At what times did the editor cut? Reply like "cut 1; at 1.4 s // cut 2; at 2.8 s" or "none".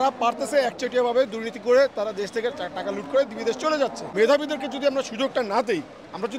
cut 1; at 4.1 s